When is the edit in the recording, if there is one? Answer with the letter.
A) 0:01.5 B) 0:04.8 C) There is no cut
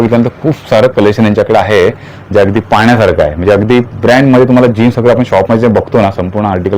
C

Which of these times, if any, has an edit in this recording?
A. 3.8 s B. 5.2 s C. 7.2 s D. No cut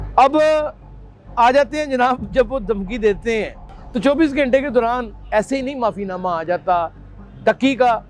D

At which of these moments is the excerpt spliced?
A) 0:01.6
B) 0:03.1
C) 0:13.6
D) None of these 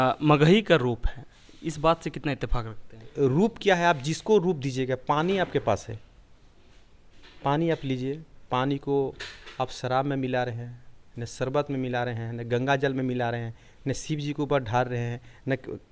B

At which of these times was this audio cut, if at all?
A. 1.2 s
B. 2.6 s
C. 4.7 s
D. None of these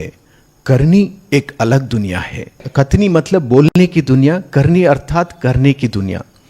B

